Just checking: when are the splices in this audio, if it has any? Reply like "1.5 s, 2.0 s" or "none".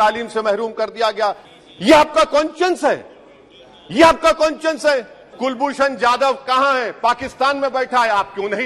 1.5 s, 5.3 s